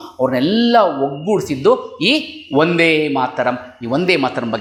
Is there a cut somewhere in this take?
no; 0 cuts

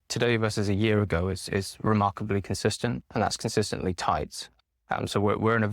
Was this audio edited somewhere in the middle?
yes; 1 cut; at 4.4 s

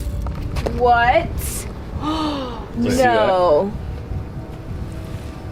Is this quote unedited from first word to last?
yes; 0 cuts

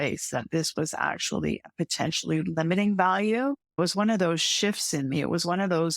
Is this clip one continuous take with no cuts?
no; 1 cut; at 3.8 s

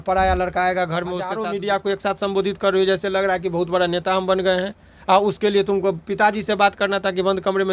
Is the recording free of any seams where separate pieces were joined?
no; 1 cut; at 1.4 s

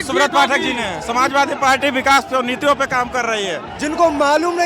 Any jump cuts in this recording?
yes; 1 cut; at 3.7 s

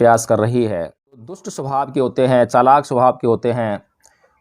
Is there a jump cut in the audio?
yes; 1 cut; at 1.4 s

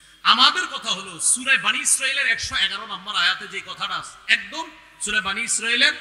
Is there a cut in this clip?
no; 0 cuts

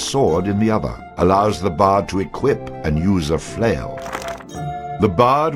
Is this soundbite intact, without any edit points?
no; 2 cuts; at 1.0 s, 4.4 s

